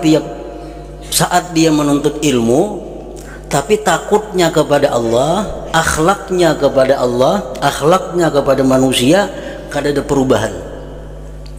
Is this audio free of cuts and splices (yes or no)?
yes